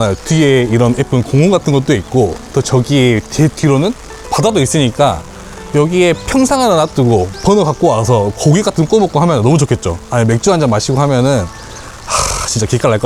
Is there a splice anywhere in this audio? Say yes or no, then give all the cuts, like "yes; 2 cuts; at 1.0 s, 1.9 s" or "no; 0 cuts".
no; 0 cuts